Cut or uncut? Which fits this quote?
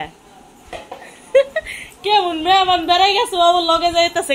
uncut